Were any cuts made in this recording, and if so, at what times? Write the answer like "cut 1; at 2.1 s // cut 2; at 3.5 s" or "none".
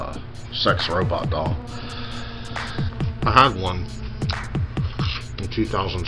cut 1; at 2.9 s

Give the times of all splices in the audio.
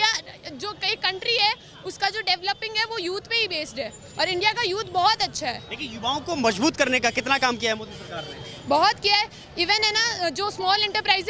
none

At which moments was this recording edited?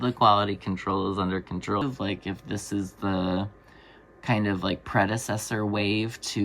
cut 1; at 1.8 s

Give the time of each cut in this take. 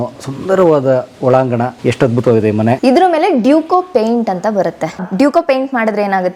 cut 1; at 1.7 s // cut 2; at 2.8 s // cut 3; at 4.9 s

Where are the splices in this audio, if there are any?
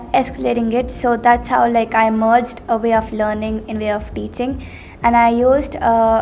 none

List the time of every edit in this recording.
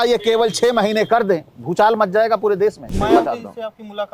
cut 1; at 1.6 s // cut 2; at 2.9 s

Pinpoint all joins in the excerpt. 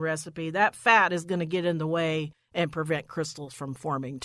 cut 1; at 2.4 s

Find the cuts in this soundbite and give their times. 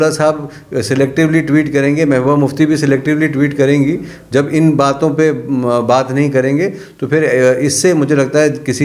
none

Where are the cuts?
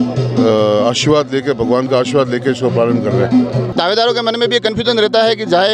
cut 1; at 3.6 s

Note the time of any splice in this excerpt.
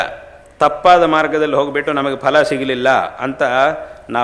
none

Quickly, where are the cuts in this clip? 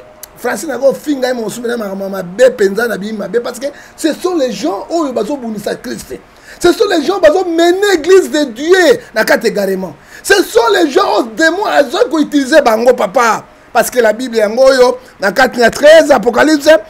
none

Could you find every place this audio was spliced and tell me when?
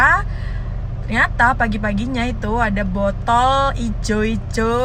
none

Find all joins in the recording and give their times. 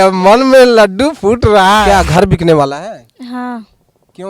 cut 1; at 1.8 s

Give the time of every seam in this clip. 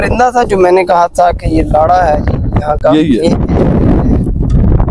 none

